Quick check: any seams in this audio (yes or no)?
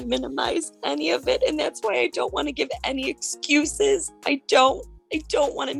no